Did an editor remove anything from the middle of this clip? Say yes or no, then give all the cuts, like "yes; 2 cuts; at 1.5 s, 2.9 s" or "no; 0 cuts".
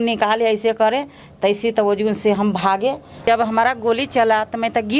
yes; 1 cut; at 3.2 s